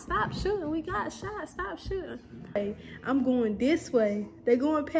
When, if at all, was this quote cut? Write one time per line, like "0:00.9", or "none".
0:02.6